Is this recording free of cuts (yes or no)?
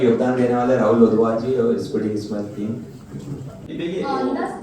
no